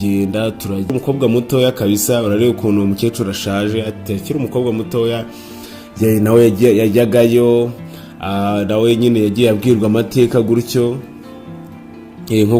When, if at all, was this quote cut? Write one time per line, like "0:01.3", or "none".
0:00.9